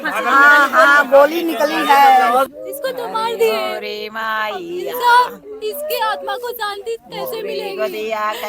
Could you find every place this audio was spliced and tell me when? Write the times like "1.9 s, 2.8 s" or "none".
2.5 s